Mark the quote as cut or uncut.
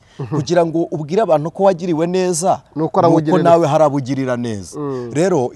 uncut